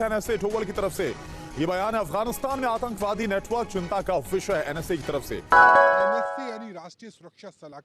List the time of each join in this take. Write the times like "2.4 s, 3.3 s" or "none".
5.4 s, 6.4 s